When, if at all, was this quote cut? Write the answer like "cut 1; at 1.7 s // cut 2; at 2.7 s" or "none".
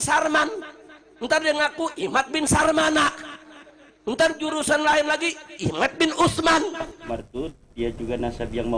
cut 1; at 6.9 s